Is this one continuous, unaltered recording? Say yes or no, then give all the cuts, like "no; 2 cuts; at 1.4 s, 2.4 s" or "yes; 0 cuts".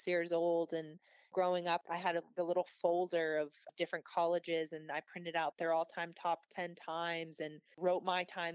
yes; 0 cuts